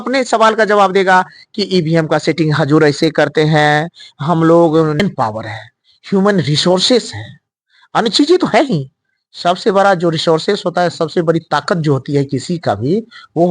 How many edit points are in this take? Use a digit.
1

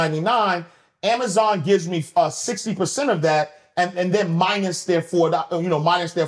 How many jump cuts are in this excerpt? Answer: 0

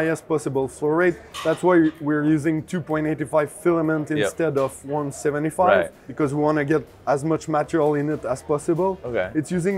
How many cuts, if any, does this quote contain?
0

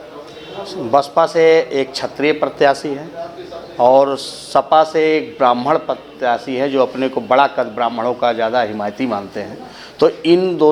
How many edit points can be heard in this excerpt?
0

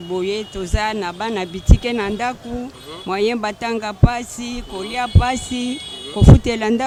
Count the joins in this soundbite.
0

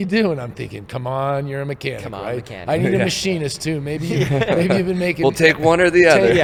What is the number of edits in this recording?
0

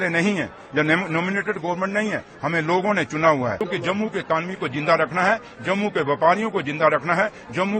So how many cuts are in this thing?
1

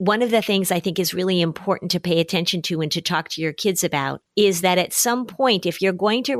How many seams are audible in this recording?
0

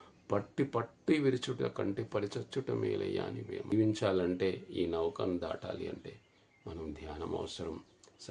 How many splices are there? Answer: 1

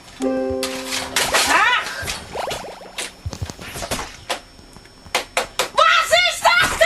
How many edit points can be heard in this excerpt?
1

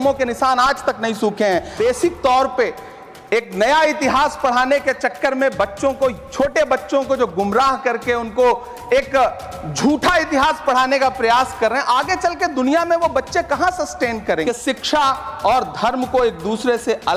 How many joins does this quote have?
2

